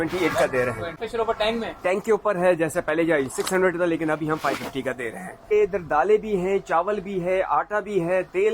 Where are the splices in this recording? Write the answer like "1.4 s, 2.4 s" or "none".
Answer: 1.0 s, 5.5 s